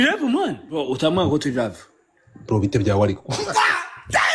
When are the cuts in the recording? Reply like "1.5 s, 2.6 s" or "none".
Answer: 0.8 s, 3.4 s